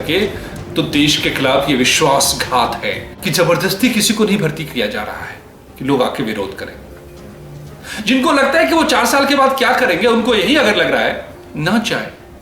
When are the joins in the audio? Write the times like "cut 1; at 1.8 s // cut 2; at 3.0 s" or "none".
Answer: cut 1; at 3.1 s